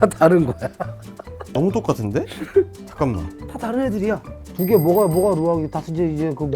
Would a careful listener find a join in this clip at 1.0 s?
no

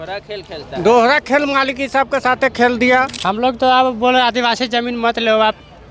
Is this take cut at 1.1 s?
no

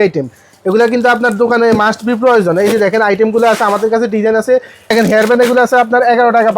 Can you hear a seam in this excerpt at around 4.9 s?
yes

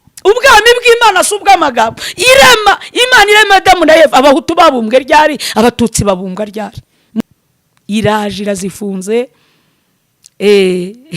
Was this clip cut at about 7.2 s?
yes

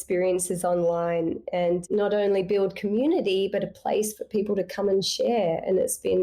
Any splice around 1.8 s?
yes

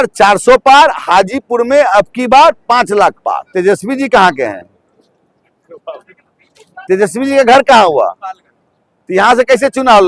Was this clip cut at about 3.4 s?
yes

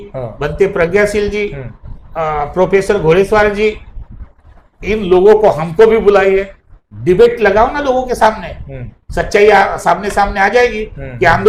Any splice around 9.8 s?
no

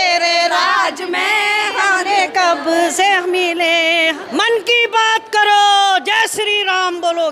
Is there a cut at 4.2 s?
yes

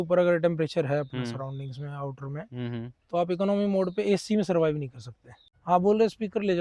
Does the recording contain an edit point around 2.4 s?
no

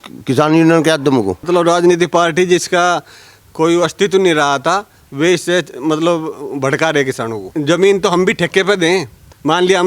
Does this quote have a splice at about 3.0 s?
no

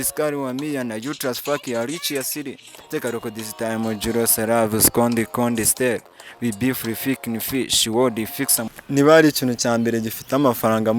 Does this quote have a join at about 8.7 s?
yes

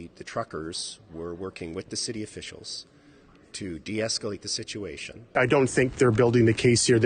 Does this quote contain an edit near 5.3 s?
yes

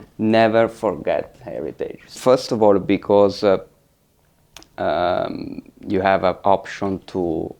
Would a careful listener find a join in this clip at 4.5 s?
no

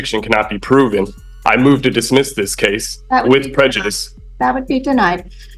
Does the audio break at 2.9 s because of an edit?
no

